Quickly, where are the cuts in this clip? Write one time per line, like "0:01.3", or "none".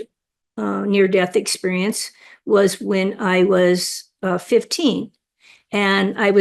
none